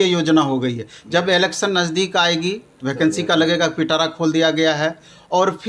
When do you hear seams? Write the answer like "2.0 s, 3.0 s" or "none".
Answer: none